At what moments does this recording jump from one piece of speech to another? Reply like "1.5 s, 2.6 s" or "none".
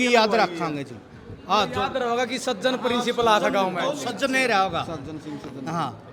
none